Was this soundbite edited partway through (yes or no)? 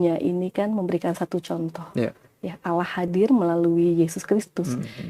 no